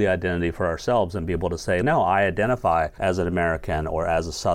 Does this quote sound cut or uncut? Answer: cut